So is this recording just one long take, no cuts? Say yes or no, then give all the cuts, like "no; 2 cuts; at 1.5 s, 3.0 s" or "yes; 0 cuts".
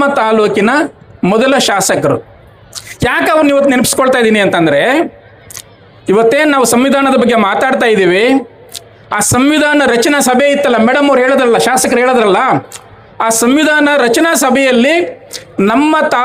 yes; 0 cuts